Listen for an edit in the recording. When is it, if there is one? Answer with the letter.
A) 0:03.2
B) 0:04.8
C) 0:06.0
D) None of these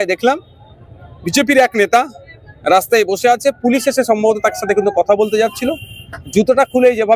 D